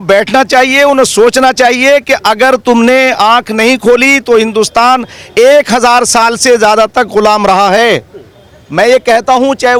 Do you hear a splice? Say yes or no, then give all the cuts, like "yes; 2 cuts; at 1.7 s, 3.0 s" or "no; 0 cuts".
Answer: no; 0 cuts